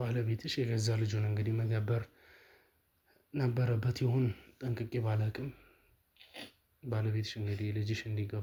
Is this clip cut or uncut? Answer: uncut